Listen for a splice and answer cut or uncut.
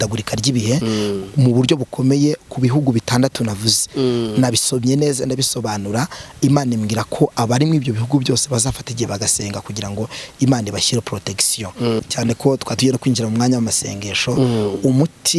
cut